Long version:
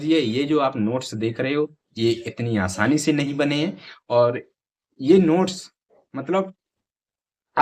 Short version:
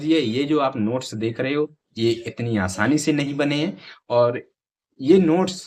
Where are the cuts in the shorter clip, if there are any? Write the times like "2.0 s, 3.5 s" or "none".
none

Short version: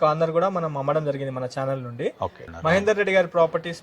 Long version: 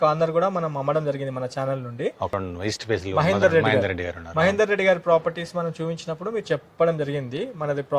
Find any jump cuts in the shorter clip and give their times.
2.4 s

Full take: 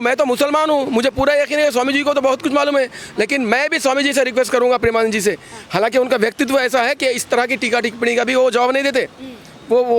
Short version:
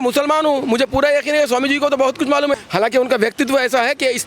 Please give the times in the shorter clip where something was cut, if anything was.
2.5 s

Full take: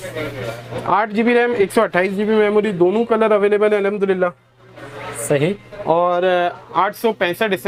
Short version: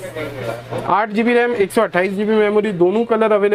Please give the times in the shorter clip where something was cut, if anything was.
none

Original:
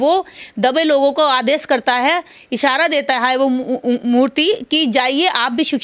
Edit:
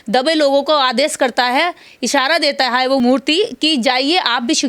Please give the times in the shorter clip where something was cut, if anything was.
3.0 s

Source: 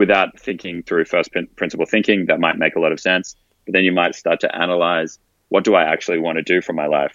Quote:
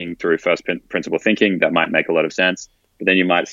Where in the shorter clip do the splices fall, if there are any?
none

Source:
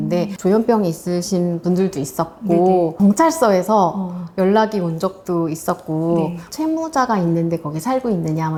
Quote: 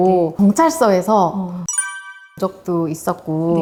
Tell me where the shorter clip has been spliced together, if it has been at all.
none

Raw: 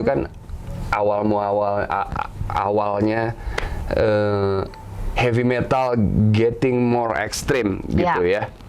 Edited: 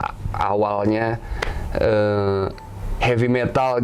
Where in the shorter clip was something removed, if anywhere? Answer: none

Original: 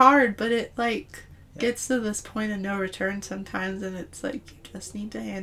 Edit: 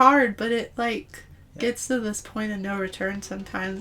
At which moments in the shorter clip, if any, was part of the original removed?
none

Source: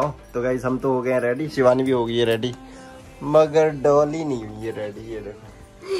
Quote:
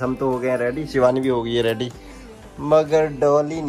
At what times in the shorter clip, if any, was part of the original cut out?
none

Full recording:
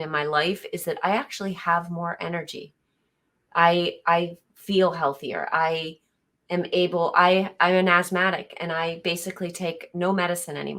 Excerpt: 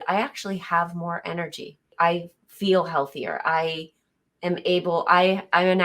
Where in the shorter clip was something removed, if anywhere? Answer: 1.9 s

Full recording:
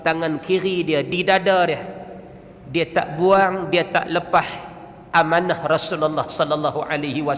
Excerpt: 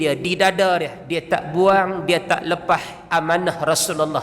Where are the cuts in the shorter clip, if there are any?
1.0 s, 3.0 s

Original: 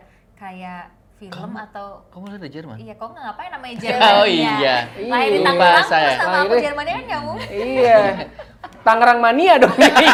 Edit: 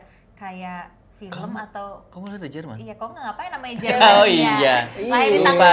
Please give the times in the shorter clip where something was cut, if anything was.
none

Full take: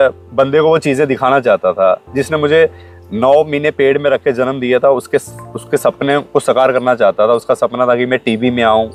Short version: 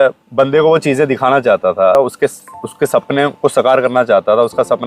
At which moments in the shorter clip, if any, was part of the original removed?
1.9 s

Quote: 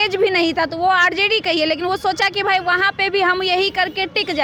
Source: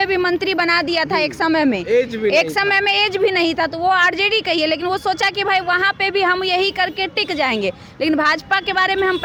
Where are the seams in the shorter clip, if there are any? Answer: none

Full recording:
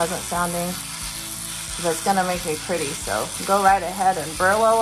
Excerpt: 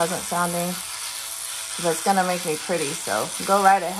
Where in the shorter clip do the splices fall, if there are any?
none

